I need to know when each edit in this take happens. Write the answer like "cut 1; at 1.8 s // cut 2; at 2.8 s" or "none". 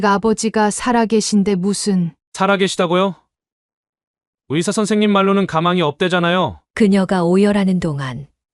cut 1; at 6.6 s